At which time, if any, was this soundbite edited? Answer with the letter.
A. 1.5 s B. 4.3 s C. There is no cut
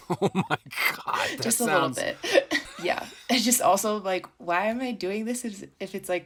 C